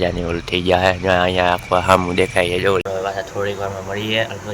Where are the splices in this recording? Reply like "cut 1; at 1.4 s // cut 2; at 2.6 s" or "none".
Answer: cut 1; at 2.8 s